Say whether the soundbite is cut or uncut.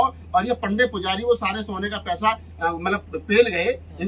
uncut